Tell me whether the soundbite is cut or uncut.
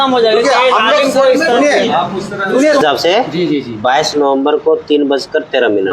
cut